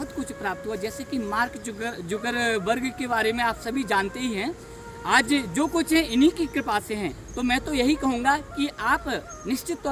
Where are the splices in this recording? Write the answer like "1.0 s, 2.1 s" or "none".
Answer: none